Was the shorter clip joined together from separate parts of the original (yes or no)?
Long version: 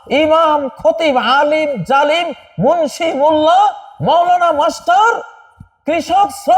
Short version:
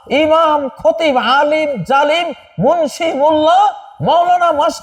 no